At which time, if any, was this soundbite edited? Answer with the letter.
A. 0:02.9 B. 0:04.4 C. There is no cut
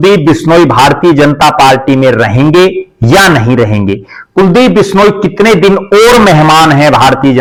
C